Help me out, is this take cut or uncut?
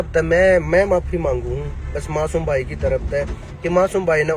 uncut